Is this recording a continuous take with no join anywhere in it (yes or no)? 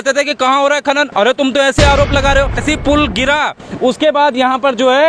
no